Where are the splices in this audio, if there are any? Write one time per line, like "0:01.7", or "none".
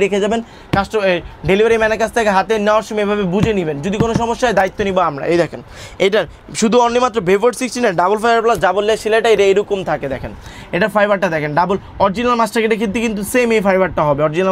none